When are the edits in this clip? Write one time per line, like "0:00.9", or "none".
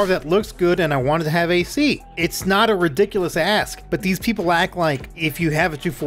0:02.1
0:03.8
0:05.1